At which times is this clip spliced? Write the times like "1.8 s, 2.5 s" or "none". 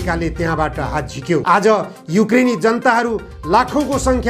1.4 s